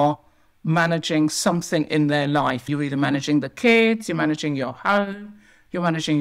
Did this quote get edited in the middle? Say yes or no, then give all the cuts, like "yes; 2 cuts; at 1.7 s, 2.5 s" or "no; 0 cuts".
yes; 1 cut; at 2.7 s